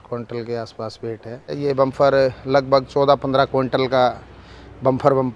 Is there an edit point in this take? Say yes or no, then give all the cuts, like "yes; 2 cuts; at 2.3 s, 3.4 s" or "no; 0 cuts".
yes; 1 cut; at 1.5 s